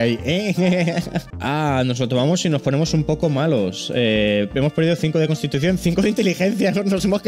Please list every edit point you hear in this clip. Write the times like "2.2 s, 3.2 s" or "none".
1.3 s